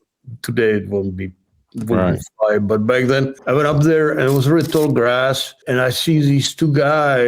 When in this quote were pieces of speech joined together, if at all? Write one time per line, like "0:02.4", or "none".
0:03.4
0:05.5